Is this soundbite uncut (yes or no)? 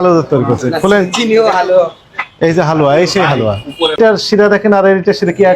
no